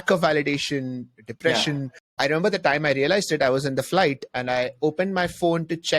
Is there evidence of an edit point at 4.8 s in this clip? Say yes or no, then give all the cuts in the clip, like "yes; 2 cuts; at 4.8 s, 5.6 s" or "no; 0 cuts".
no; 1 cut; at 1.9 s